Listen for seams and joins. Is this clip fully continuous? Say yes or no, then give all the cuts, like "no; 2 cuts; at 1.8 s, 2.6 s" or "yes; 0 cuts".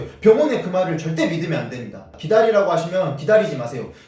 no; 1 cut; at 2.1 s